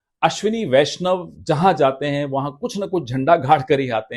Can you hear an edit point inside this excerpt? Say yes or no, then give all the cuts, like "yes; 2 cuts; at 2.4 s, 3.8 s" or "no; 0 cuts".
no; 0 cuts